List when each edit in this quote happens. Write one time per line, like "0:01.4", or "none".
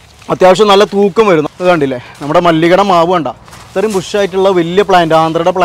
0:01.5